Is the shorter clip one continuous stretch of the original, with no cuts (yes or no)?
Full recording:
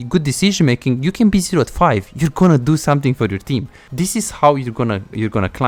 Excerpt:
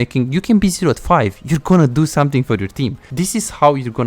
no